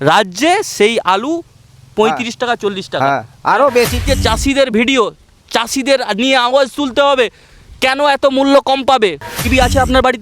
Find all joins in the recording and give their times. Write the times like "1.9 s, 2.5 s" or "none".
4.0 s, 9.2 s